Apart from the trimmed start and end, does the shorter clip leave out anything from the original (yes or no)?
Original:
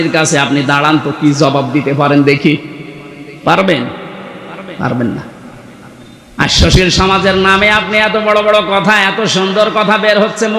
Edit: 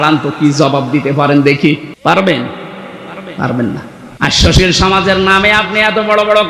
yes